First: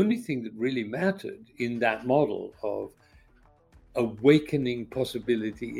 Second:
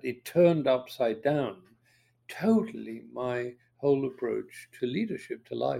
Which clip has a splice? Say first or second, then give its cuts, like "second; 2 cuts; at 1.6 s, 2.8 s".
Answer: second; 1 cut; at 4.6 s